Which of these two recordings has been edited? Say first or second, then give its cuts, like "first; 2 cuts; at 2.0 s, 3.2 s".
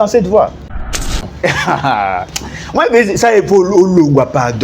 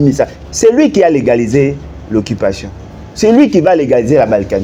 first; 1 cut; at 1.1 s